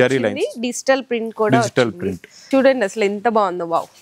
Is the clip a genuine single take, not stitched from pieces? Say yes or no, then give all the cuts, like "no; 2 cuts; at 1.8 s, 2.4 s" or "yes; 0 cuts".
no; 1 cut; at 2.3 s